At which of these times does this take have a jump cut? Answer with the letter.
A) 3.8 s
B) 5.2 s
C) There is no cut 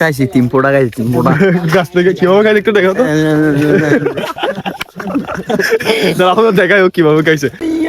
C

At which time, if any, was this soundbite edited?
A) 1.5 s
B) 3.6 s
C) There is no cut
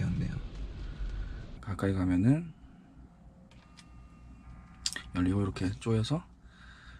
A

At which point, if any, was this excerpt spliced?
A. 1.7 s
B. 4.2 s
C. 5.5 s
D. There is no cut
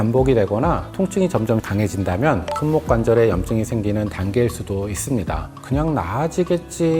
C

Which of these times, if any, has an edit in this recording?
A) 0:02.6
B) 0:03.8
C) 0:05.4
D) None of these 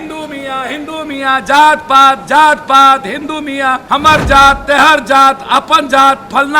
B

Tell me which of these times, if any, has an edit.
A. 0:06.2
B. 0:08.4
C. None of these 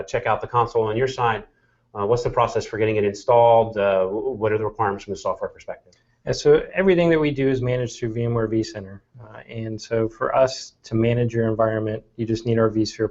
B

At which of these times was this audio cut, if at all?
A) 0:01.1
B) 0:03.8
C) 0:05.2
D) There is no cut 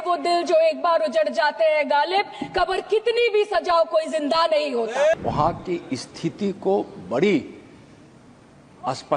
C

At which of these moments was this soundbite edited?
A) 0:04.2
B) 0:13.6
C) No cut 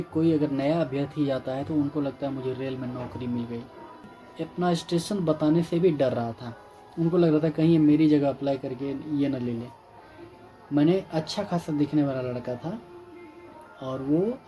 A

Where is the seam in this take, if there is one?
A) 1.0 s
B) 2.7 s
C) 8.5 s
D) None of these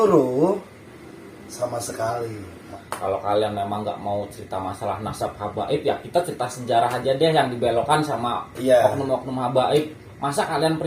B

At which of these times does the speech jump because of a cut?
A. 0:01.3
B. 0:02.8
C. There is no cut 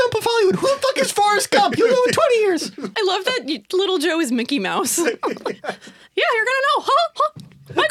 B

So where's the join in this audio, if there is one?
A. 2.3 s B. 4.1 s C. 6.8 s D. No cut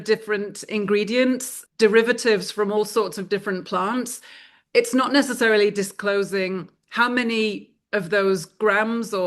D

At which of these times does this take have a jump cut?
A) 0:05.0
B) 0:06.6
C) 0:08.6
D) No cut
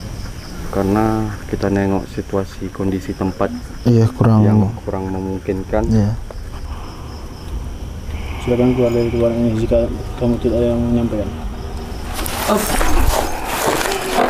B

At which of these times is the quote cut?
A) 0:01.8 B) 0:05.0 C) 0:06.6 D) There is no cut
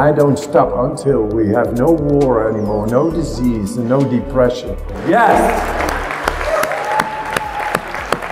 B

